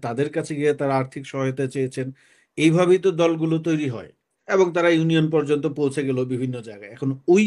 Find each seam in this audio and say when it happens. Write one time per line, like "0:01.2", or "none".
0:04.3